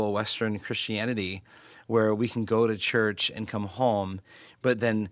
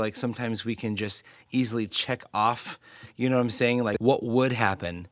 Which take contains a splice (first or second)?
second